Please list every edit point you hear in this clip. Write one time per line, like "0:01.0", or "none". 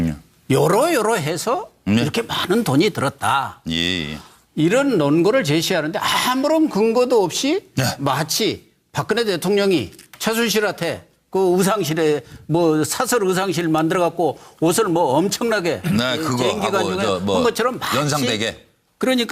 0:05.1